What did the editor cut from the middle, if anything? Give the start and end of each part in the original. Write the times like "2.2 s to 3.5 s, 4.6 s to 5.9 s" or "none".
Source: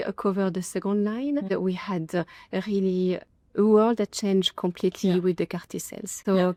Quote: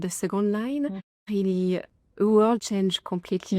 1.4 s to 2.3 s, 4.0 s to 4.1 s

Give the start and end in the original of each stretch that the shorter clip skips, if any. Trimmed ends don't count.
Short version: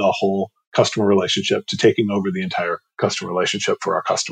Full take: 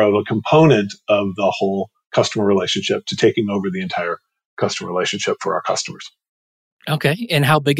4.2 s to 4.4 s

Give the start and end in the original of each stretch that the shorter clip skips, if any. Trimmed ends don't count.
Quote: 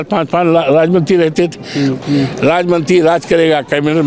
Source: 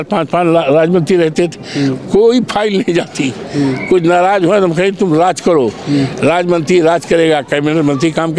2.0 s to 5.8 s

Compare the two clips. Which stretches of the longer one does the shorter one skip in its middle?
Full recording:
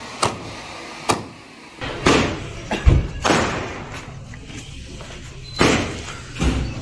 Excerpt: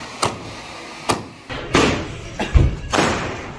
1.4 s to 1.7 s

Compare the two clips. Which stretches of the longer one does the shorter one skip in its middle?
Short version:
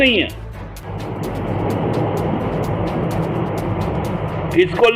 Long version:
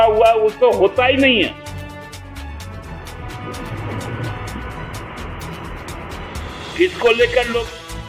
2.1 s to 3.1 s

